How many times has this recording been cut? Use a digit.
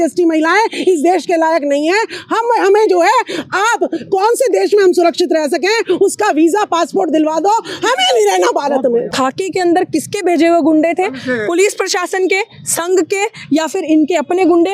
1